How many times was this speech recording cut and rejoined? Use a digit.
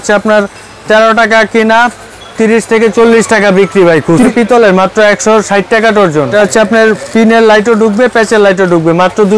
2